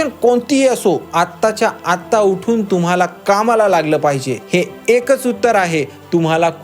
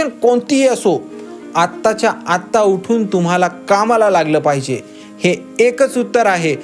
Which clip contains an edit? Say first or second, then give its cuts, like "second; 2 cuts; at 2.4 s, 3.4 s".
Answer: first; 2 cuts; at 1.1 s, 4.3 s